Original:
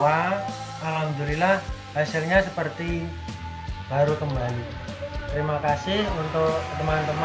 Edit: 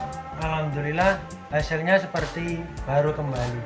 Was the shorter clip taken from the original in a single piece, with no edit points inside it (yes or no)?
no